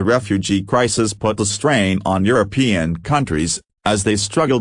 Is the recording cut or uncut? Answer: cut